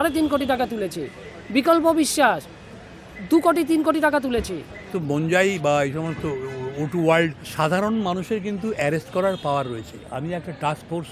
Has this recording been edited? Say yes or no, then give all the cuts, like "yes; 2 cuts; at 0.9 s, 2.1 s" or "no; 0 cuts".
yes; 2 cuts; at 4.9 s, 7.5 s